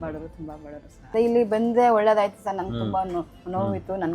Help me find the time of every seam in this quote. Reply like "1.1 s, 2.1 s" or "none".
1.1 s